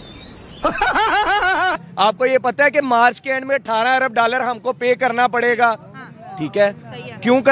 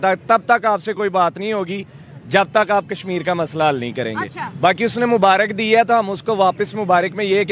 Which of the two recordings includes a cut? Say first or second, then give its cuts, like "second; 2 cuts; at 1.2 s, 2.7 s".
first; 1 cut; at 1.8 s